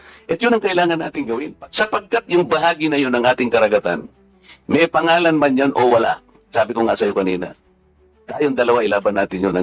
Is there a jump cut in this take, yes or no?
yes